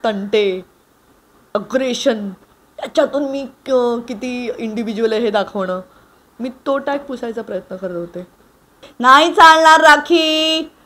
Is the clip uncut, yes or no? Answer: no